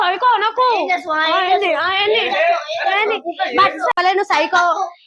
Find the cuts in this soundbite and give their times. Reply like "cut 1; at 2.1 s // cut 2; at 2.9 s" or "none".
cut 1; at 3.9 s

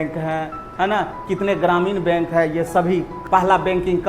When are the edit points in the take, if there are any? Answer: cut 1; at 3.2 s

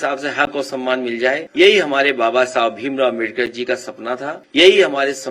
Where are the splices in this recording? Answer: cut 1; at 1.5 s // cut 2; at 4.4 s

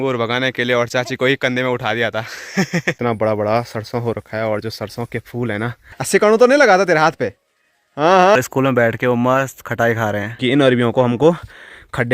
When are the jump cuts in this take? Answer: cut 1; at 3.0 s // cut 2; at 5.9 s // cut 3; at 8.3 s // cut 4; at 10.3 s

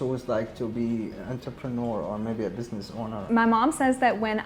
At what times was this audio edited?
cut 1; at 3.2 s

